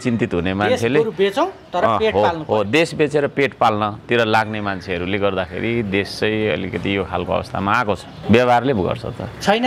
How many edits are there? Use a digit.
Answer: 1